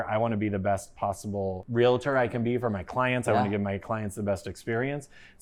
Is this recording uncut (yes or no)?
yes